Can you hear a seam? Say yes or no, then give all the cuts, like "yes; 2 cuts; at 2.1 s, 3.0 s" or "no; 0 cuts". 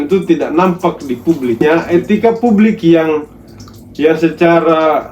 yes; 1 cut; at 1.6 s